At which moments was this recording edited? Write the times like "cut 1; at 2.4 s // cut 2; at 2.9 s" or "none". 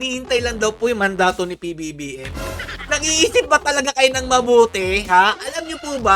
cut 1; at 2.7 s